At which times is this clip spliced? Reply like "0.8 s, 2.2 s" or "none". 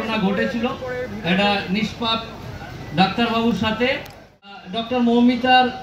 4.4 s